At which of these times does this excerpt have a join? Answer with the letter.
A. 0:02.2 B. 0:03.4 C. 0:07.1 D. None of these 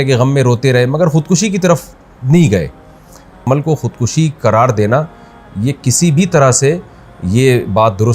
B